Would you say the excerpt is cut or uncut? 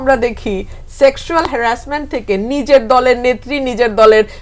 uncut